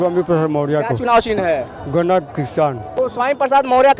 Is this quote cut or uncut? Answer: cut